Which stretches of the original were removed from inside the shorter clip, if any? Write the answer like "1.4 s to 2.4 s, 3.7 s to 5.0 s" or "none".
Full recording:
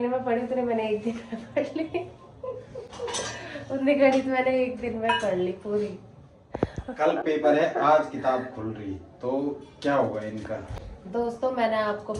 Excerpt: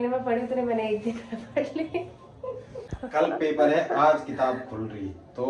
2.9 s to 6.8 s

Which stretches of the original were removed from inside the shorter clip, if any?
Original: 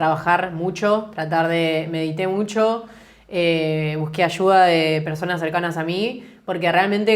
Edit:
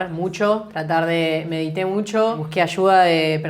2.9 s to 4.1 s

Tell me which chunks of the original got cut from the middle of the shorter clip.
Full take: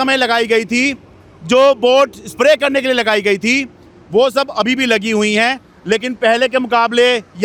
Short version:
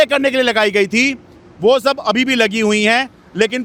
none

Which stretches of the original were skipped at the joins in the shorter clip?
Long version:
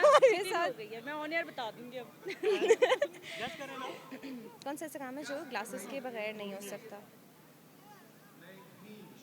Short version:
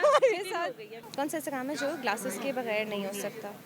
1.0 s to 4.5 s

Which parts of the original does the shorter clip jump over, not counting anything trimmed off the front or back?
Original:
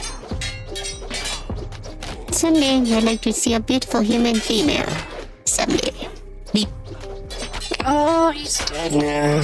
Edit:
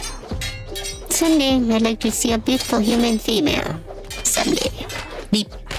1.1 s to 2.3 s

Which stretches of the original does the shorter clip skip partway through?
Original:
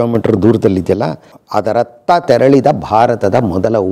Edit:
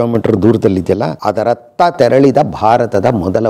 1.2 s to 1.5 s

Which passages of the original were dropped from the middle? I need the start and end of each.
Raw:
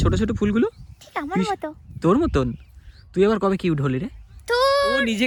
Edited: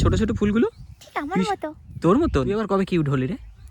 2.6 s to 3.3 s

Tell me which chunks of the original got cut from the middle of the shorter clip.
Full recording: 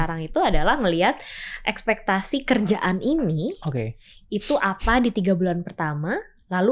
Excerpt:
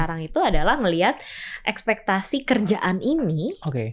none

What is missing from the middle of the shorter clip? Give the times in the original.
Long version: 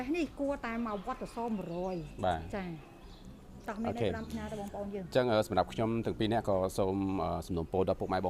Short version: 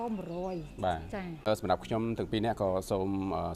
2.9 s to 5.3 s

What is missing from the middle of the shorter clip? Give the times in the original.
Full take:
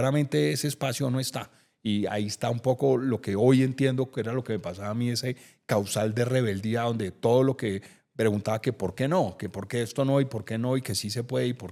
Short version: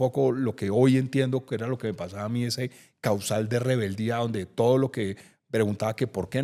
none

